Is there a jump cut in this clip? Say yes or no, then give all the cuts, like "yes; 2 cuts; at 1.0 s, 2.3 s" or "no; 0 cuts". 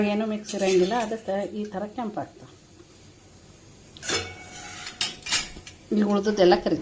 no; 0 cuts